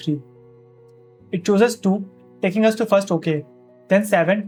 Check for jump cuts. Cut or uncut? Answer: uncut